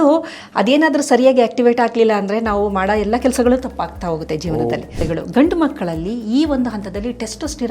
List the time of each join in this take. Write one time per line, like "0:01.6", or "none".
0:05.0